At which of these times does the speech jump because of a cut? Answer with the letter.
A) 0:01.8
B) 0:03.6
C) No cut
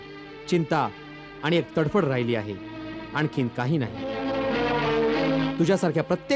C